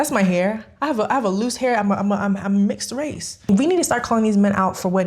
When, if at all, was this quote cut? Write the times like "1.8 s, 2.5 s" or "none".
3.5 s